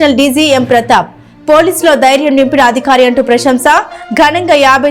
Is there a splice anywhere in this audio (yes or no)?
no